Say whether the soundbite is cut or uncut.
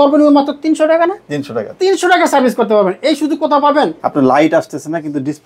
cut